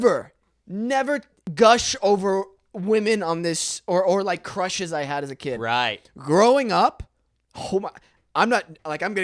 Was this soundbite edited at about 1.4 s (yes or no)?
yes